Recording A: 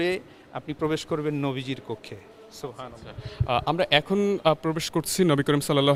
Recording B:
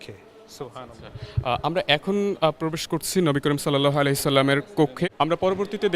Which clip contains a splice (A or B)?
B